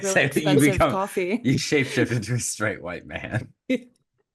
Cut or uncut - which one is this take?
uncut